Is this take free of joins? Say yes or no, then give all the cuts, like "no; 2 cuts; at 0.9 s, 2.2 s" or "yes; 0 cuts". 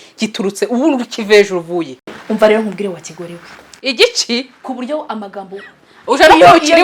yes; 0 cuts